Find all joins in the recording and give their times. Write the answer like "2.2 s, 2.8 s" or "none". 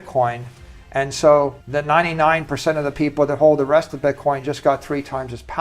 1.6 s